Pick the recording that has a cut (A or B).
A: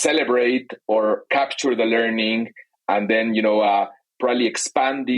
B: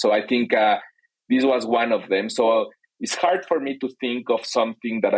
A